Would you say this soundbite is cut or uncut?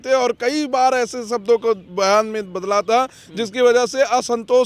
uncut